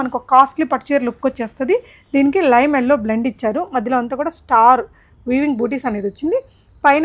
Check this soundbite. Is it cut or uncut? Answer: uncut